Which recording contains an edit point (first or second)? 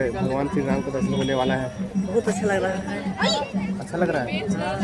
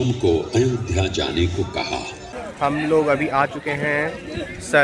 second